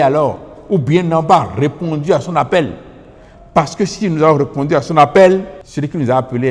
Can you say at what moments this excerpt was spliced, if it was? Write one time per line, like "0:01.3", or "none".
0:05.6